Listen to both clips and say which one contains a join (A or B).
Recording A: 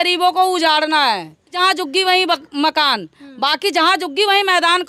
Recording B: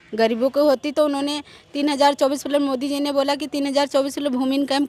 A